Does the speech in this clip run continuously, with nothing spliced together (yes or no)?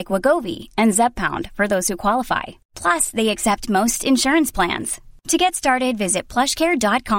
yes